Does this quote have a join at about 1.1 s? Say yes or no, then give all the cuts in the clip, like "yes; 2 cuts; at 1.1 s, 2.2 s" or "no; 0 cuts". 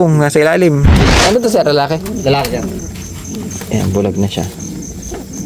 yes; 1 cut; at 1.1 s